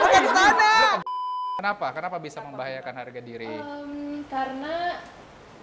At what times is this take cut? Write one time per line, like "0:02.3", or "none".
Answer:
0:01.0